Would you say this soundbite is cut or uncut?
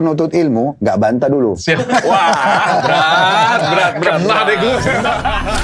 uncut